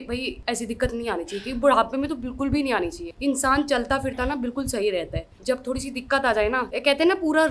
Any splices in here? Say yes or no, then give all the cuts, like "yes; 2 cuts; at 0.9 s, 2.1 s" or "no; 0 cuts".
no; 0 cuts